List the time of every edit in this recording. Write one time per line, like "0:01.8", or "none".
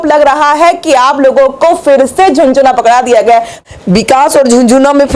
0:03.6